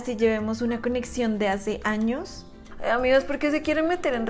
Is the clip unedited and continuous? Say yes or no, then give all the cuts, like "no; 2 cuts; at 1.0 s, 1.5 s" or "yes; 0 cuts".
yes; 0 cuts